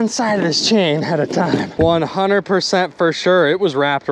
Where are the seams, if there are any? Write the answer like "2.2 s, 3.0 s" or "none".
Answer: 1.7 s